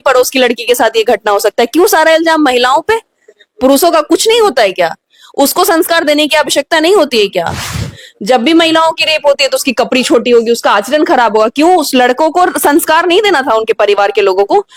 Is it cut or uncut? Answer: uncut